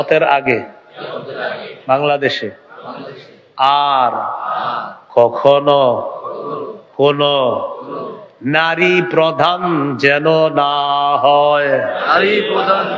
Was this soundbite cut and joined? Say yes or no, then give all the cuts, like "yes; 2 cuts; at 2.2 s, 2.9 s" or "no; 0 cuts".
no; 0 cuts